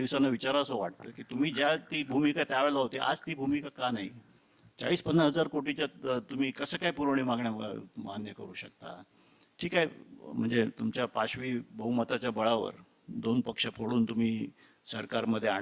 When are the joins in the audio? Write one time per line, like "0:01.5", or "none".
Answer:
none